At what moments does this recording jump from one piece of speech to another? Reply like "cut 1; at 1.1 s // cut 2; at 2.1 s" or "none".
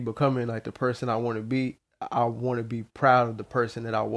none